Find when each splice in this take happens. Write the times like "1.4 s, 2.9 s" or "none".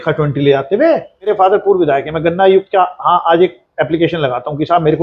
1.3 s